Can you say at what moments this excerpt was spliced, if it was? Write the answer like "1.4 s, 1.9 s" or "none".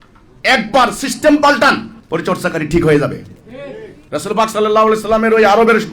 1.9 s